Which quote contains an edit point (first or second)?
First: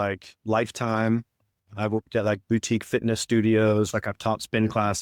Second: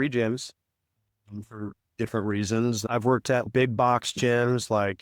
second